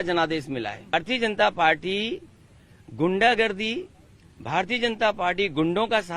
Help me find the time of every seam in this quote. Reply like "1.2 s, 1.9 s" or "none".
0.9 s

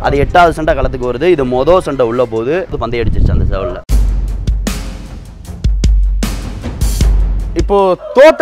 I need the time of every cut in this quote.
2.8 s, 3.9 s, 7.5 s

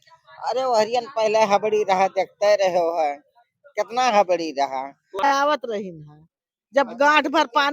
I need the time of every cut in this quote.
5.2 s

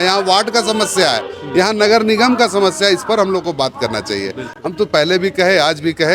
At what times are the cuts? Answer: none

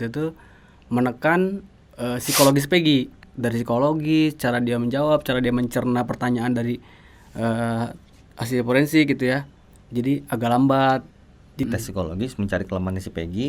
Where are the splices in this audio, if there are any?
3.2 s, 11.7 s

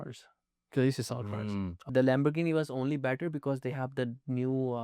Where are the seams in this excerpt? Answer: 1.8 s

